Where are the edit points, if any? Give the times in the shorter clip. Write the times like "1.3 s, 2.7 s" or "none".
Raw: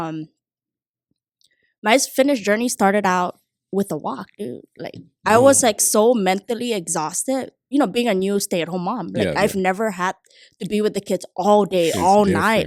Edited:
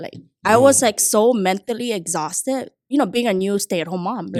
none